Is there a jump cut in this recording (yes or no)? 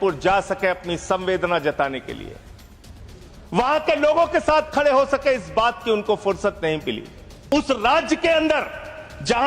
yes